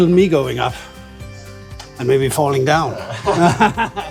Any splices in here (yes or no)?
no